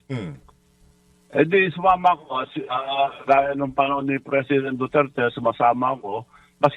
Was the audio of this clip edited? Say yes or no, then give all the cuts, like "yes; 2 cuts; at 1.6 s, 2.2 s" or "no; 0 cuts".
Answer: no; 0 cuts